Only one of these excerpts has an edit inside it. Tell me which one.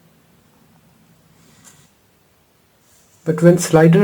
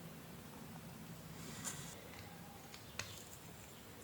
first; 1 cut; at 1.9 s

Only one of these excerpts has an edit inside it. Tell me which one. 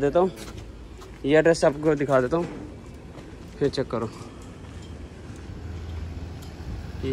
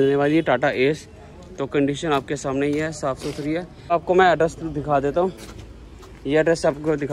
second; 1 cut; at 3.9 s

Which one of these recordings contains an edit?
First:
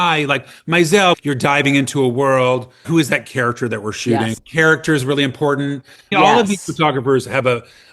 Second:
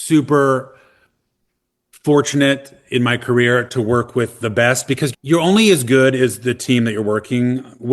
first; 4 cuts; at 1.2 s, 2.8 s, 4.4 s, 6.1 s

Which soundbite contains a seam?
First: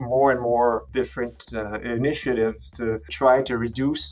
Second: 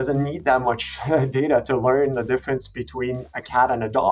first; 2 cuts; at 0.9 s, 3.1 s

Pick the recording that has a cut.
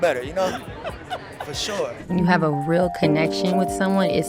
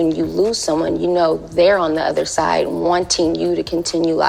first; 1 cut; at 2.0 s

